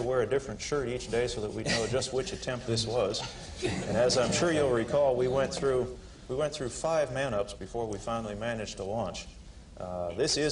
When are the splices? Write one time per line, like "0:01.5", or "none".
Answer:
0:08.7